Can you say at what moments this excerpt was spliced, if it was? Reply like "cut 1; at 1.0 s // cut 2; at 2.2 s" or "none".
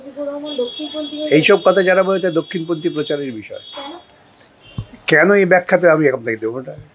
none